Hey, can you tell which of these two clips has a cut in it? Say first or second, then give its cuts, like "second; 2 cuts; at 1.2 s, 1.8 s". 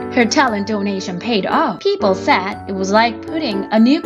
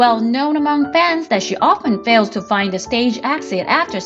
first; 2 cuts; at 1.8 s, 2.6 s